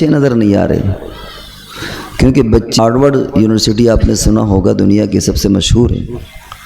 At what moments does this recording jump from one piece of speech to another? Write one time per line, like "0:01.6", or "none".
0:02.8